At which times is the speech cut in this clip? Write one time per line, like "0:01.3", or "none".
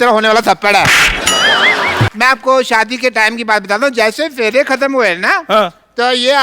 0:02.1